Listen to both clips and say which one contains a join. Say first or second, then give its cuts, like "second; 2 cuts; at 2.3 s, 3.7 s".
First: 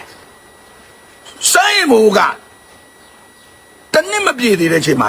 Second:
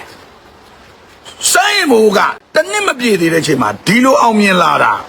second; 1 cut; at 2.4 s